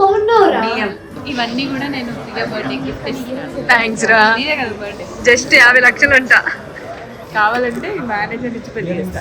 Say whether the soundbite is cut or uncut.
cut